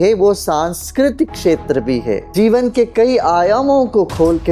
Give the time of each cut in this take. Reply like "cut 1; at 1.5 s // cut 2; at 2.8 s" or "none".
cut 1; at 2.3 s